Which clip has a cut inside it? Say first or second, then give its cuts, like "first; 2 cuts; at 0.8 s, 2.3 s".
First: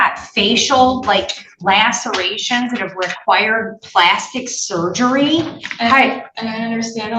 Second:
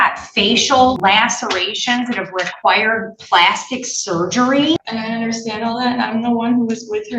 second; 2 cuts; at 1.0 s, 4.8 s